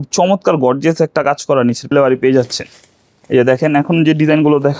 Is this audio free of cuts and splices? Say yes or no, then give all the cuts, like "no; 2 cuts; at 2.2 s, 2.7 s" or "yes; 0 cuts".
no; 1 cut; at 1.9 s